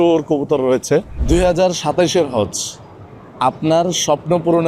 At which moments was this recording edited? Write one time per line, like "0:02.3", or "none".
0:01.2